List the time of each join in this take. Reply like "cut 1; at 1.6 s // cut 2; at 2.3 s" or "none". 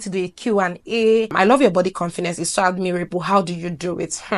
cut 1; at 1.3 s